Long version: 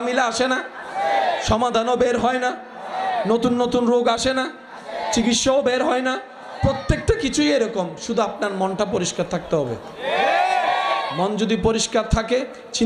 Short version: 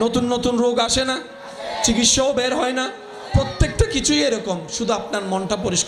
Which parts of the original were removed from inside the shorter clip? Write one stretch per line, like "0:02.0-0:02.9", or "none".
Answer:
none